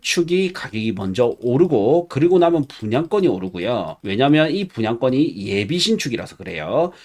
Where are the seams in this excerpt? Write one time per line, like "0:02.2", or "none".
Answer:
0:04.0